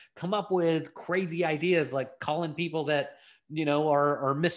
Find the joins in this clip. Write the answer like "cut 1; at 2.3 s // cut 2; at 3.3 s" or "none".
none